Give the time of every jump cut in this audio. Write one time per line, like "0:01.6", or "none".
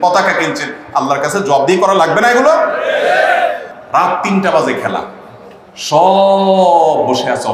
0:03.7